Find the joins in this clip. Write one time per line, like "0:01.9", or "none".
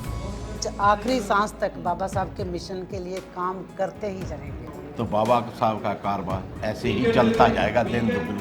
0:04.6